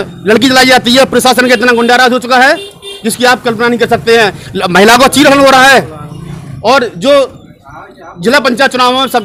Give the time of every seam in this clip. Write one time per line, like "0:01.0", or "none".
none